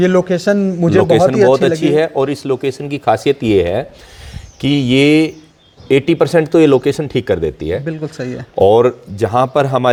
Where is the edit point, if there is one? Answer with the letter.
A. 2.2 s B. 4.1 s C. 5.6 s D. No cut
D